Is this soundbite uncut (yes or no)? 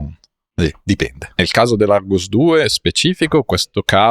no